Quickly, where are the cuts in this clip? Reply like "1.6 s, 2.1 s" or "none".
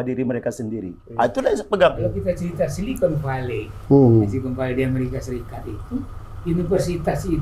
2.1 s